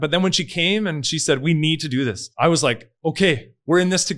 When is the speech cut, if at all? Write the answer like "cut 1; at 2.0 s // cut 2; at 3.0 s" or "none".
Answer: cut 1; at 2.2 s